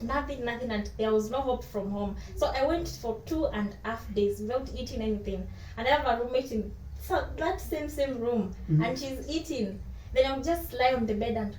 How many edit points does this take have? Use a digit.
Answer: 0